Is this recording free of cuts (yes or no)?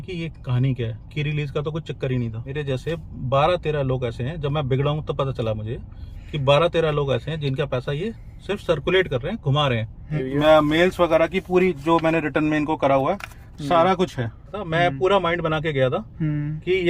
no